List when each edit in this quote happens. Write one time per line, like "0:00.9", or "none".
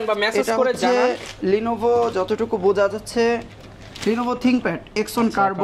none